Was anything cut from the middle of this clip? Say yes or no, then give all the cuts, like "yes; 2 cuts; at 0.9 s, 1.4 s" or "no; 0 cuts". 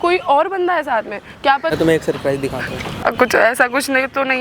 yes; 2 cuts; at 1.7 s, 3.0 s